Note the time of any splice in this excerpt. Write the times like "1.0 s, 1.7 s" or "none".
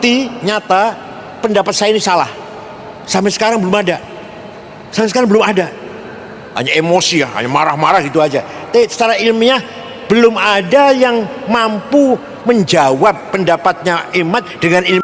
none